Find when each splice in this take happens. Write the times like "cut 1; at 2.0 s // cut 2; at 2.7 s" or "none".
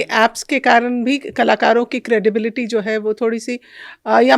none